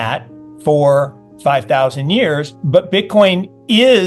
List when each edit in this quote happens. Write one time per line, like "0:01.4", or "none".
0:02.5